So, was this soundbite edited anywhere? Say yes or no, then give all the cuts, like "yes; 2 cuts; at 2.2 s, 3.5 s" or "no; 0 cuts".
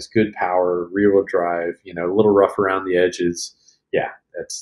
no; 0 cuts